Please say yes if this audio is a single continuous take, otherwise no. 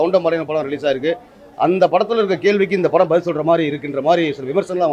yes